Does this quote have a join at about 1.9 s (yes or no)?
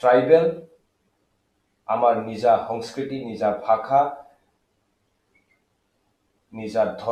no